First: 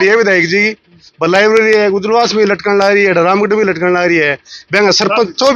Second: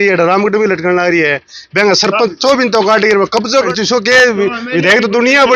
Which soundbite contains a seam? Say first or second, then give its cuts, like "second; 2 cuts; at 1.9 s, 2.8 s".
second; 1 cut; at 3.5 s